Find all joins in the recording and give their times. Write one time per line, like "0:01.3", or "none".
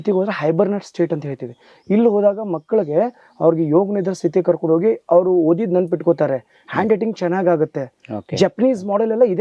none

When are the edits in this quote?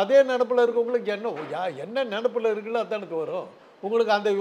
none

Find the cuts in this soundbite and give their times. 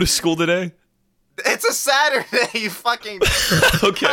none

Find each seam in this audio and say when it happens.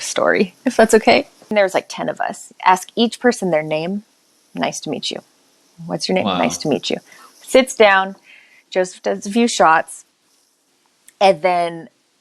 0:01.3

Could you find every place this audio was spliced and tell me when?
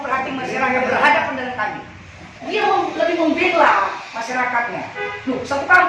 0:02.5

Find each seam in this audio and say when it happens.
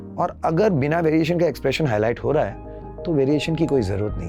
none

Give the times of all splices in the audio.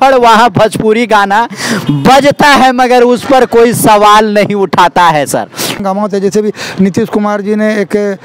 0:05.8

